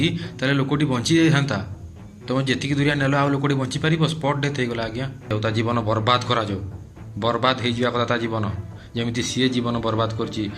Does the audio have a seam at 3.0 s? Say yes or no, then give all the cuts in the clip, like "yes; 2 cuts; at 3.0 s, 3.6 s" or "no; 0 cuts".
no; 1 cut; at 5.3 s